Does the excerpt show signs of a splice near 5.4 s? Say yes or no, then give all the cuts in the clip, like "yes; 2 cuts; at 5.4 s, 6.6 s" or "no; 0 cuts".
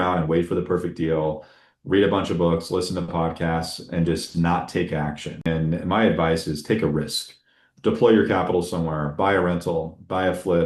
yes; 1 cut; at 5.4 s